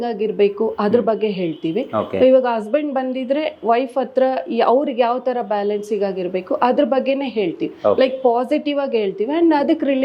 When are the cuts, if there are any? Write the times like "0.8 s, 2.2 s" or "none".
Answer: none